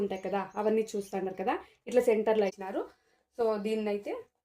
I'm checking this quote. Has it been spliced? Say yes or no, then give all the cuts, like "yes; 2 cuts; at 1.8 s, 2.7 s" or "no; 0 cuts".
yes; 1 cut; at 2.6 s